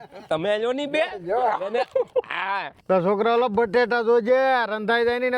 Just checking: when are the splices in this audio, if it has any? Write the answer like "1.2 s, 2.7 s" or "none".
2.7 s